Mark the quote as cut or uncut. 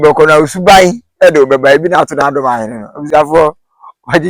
uncut